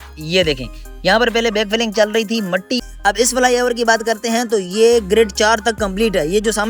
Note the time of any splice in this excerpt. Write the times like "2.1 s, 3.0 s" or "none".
2.9 s